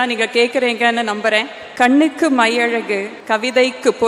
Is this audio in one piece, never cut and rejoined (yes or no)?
no